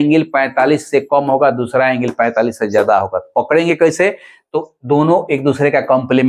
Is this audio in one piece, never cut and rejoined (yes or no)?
yes